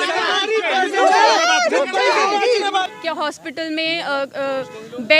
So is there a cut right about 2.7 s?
yes; 1 cut; at 2.7 s

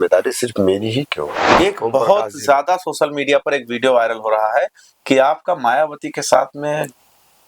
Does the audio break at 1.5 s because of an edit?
yes; 1 cut; at 1.5 s

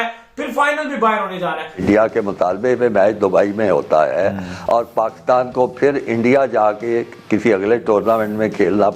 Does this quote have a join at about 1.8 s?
yes; 1 cut; at 1.8 s

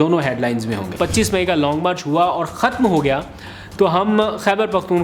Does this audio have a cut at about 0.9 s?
yes; 1 cut; at 0.9 s

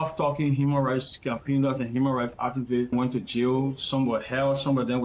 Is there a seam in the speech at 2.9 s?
yes; 1 cut; at 2.9 s

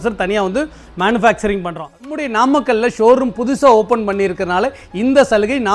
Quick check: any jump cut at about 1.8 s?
yes; 1 cut; at 1.8 s

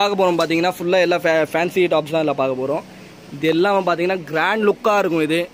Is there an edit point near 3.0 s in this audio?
no; 0 cuts

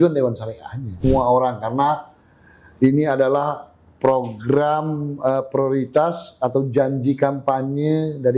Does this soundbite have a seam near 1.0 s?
yes; 1 cut; at 1.0 s

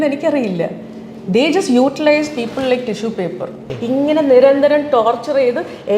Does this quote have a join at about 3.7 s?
yes; 1 cut; at 3.7 s

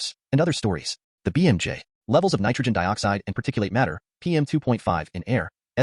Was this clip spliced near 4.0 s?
no; 0 cuts

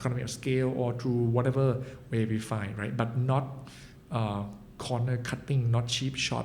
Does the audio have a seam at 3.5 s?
no; 0 cuts

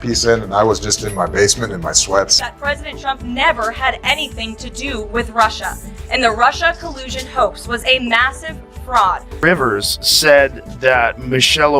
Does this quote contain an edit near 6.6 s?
no; 2 cuts; at 2.4 s, 9.3 s

